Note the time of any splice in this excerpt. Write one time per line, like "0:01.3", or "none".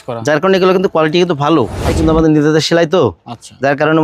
0:01.9